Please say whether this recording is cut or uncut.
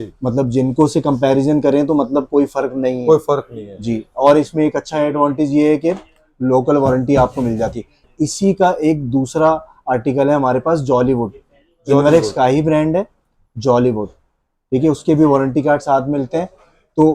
cut